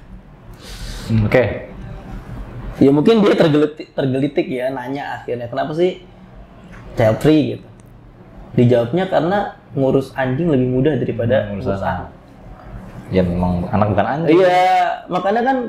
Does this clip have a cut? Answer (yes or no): no